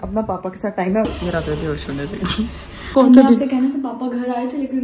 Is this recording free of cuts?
no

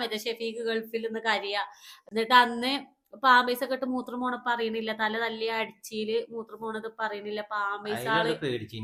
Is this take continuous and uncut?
yes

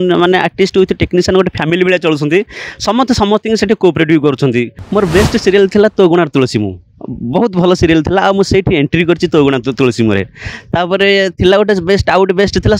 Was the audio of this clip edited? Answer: yes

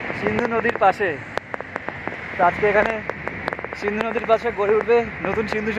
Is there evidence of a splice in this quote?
no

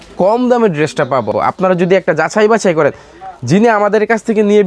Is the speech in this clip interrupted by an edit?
no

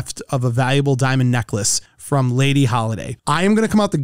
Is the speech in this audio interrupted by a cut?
no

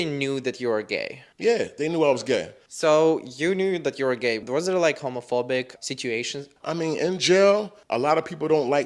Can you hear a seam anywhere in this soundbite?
no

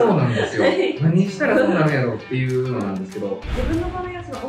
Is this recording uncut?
no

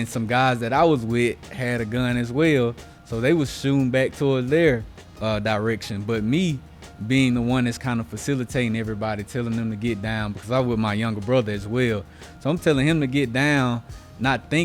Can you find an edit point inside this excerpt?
no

